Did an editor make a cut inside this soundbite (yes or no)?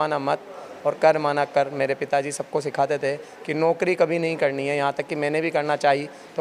no